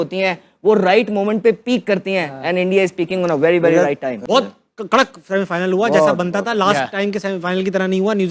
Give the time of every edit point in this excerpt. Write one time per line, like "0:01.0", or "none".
0:04.2